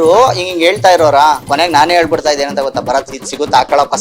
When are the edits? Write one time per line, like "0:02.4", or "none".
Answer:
0:01.4